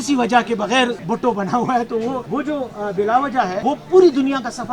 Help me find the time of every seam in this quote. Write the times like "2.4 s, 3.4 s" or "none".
1.0 s, 2.2 s, 3.6 s

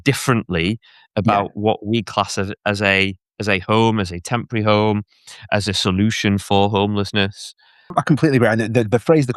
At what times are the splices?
7.9 s

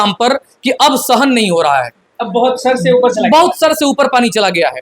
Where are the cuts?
none

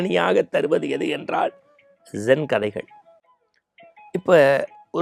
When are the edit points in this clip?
none

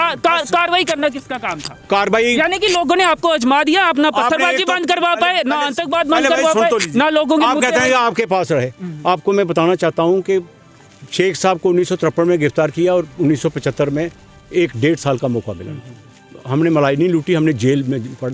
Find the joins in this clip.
none

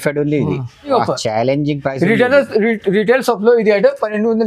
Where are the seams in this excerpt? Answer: 0.9 s

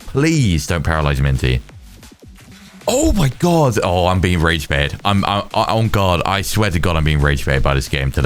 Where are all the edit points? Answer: none

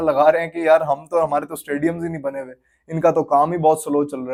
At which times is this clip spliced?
none

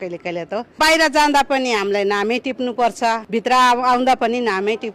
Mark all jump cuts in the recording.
0.8 s, 3.2 s

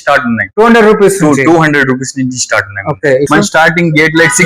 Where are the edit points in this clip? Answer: 3.3 s

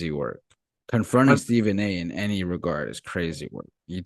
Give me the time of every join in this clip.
none

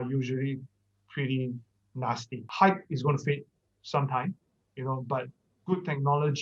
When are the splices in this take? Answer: 2.4 s

